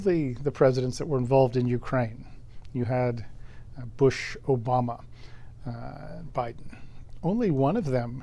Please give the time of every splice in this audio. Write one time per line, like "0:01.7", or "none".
none